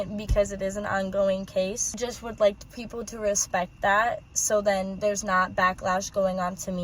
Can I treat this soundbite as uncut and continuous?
no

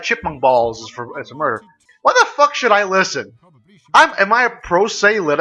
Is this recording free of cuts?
no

